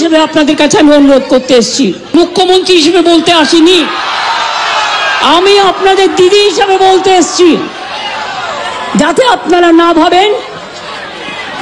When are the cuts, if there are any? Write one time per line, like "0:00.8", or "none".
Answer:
0:02.1